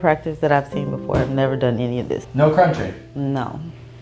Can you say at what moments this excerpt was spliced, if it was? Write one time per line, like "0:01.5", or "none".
none